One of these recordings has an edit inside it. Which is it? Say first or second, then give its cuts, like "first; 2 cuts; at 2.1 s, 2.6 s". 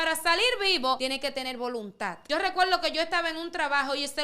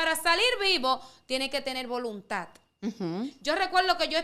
first; 2 cuts; at 1.0 s, 2.2 s